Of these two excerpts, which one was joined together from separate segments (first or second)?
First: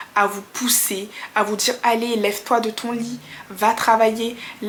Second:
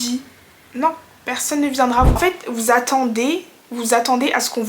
second